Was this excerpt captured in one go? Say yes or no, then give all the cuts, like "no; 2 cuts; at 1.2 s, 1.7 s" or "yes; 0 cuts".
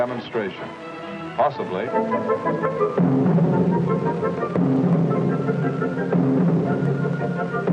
yes; 0 cuts